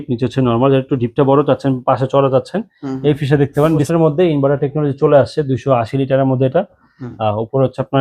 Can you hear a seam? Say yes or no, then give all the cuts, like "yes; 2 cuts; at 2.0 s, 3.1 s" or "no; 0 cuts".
yes; 1 cut; at 3.9 s